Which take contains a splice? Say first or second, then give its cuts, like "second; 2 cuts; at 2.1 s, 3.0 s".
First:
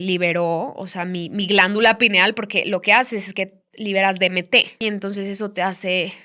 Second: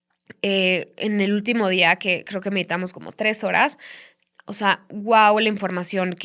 first; 1 cut; at 4.8 s